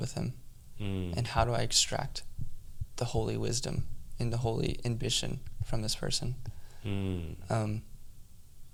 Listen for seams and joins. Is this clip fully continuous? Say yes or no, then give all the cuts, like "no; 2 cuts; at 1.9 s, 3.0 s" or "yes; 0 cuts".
yes; 0 cuts